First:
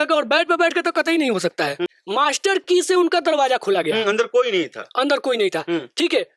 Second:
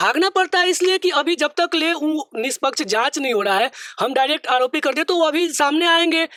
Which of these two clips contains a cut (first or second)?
first